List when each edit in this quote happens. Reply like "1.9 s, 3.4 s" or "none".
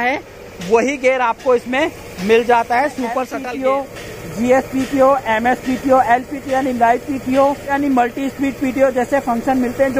3.3 s, 7.7 s